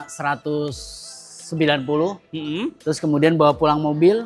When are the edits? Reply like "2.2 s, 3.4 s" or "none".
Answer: none